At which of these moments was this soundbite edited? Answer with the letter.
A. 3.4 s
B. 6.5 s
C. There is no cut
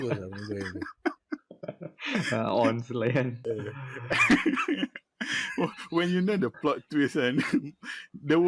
A